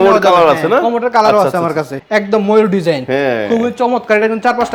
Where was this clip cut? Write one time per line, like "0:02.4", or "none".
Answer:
0:02.0